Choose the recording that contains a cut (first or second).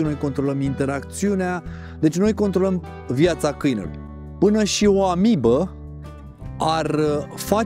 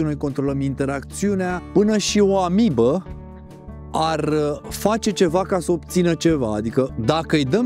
second